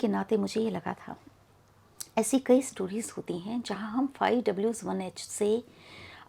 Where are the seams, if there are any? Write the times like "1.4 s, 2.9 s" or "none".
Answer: none